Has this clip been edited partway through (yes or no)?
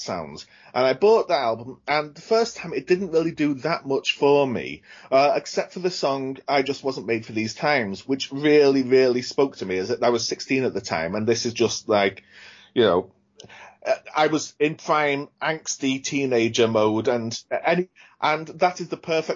yes